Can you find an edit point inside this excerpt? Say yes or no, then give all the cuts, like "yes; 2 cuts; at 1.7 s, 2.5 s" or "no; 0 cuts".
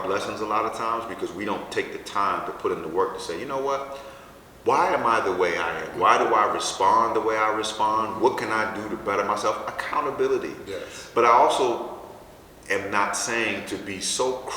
no; 0 cuts